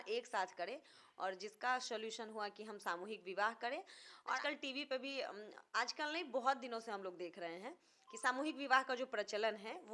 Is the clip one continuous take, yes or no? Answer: yes